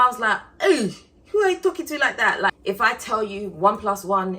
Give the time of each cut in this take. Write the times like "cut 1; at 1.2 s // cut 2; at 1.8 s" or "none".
cut 1; at 2.5 s